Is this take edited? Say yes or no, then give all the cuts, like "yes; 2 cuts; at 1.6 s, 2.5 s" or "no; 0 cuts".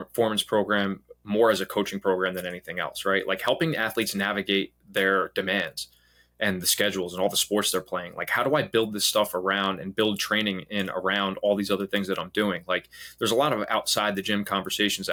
no; 0 cuts